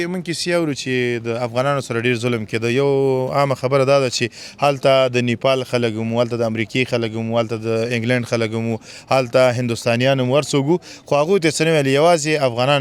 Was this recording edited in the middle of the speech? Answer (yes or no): no